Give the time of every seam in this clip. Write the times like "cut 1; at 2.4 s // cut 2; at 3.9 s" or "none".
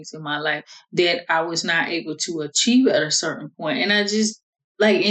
none